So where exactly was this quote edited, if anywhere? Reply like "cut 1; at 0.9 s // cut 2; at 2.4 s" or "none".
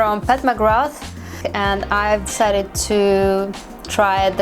cut 1; at 1.4 s